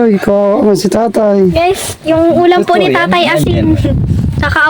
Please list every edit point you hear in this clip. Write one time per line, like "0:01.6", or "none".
none